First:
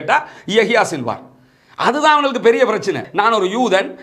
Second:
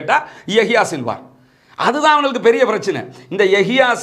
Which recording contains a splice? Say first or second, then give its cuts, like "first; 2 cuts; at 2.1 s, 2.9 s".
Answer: first; 1 cut; at 3.1 s